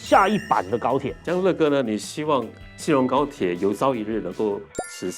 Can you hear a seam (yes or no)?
yes